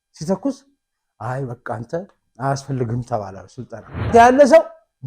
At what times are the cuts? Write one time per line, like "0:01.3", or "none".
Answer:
0:04.1